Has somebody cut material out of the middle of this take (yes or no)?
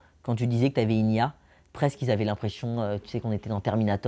no